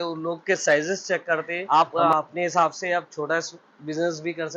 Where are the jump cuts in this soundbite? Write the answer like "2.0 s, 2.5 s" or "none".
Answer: 1.6 s